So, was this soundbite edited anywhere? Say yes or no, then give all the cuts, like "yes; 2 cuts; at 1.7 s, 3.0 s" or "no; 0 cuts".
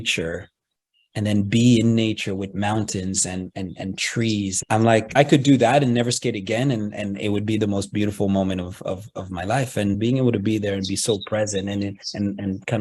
yes; 2 cuts; at 5.0 s, 10.0 s